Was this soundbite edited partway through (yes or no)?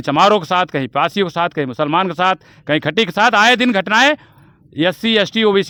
no